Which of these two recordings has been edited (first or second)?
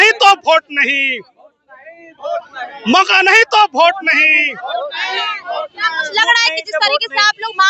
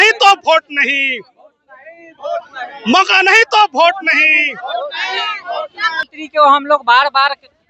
second